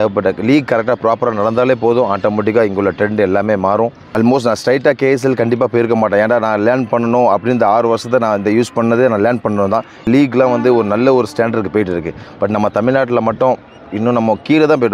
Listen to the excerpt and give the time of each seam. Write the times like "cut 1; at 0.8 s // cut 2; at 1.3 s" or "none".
cut 1; at 4.0 s // cut 2; at 10.0 s